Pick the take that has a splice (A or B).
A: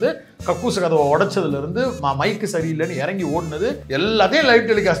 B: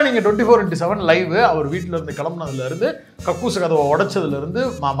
A